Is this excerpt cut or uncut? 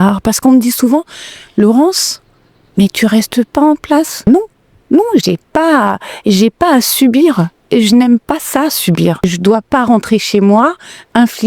cut